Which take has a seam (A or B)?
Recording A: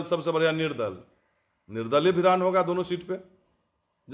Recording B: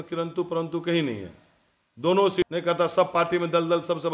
B